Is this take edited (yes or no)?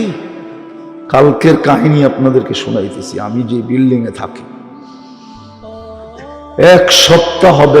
yes